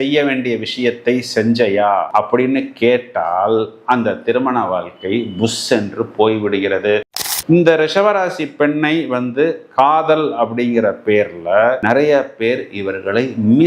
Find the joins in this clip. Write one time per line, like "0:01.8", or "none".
0:07.3

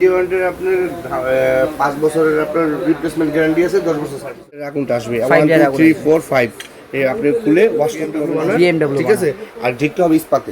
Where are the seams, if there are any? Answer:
0:04.8
0:08.3

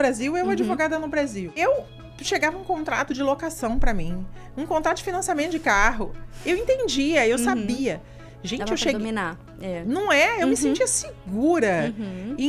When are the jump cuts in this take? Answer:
0:01.5

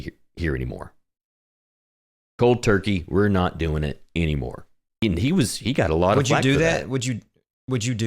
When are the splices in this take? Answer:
0:04.9

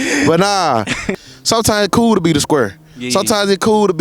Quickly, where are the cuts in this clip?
0:01.1

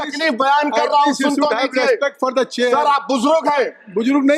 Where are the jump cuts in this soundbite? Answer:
none

